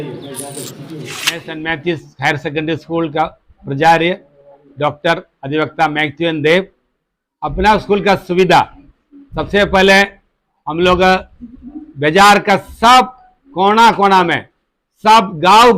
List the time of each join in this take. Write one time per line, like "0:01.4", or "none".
0:01.3